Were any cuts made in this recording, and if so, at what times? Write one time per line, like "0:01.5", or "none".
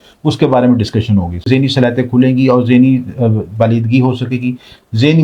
0:01.5